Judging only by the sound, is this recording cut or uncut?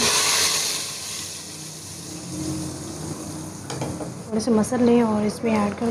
cut